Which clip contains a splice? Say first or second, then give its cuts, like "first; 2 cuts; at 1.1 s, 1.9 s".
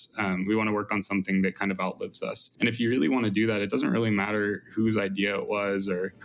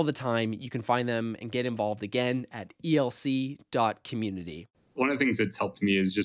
second; 1 cut; at 4.9 s